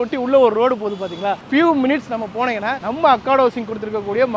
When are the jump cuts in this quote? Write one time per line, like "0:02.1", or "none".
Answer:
0:01.4